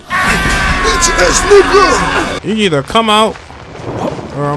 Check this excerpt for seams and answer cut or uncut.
cut